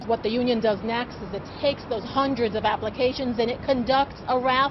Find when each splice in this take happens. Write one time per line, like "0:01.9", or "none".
none